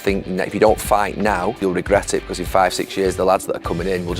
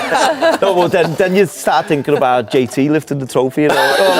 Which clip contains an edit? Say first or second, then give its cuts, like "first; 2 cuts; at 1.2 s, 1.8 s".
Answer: first; 1 cut; at 1.6 s